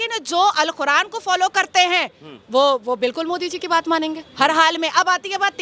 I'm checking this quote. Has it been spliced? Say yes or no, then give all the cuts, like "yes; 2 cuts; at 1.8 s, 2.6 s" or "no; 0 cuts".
no; 0 cuts